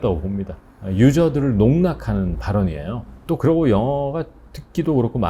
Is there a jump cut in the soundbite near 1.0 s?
no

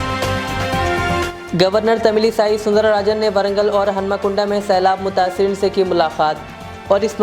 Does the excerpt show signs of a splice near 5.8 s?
no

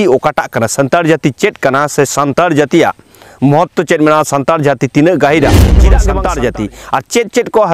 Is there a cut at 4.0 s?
no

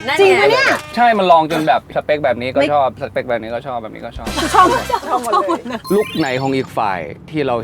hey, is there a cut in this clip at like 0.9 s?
yes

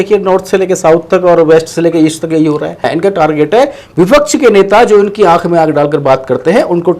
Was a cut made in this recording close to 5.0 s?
no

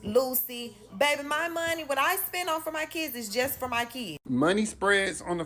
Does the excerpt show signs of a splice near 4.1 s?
yes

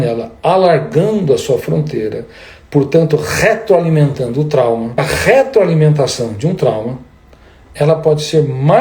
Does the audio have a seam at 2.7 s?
no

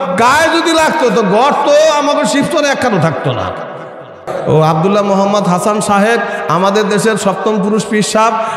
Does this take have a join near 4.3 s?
yes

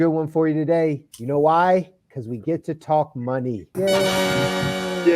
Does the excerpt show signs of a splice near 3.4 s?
no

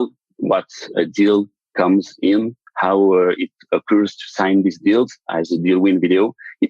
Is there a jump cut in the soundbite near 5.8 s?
no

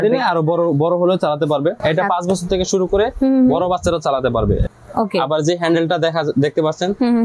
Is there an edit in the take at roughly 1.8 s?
yes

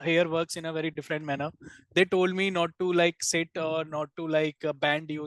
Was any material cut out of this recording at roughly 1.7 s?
no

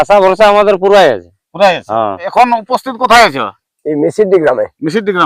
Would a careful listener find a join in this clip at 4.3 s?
no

